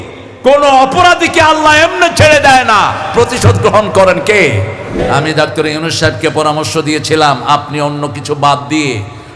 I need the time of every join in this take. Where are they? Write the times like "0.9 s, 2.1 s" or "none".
4.9 s

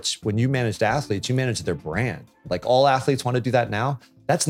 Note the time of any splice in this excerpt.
2.4 s

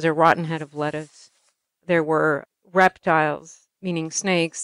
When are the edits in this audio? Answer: 2.5 s, 3.6 s

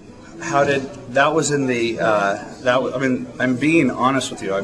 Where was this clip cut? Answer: none

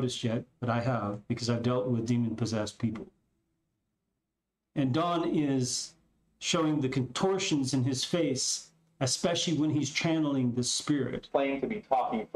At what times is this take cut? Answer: 11.3 s

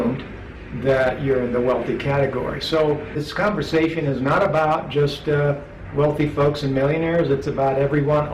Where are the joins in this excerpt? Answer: 3.2 s

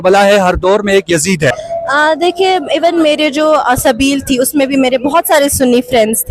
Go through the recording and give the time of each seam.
1.6 s

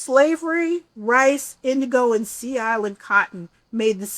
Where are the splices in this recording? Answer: 0.9 s

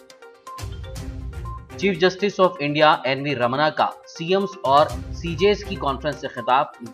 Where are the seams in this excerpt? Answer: 1.0 s

